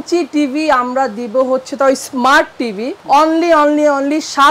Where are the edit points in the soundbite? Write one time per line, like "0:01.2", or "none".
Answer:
none